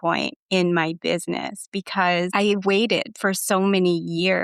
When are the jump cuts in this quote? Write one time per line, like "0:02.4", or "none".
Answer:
0:02.3